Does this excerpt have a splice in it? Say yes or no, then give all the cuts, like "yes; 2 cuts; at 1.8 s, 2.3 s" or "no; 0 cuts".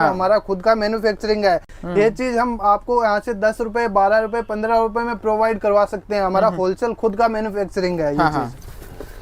no; 0 cuts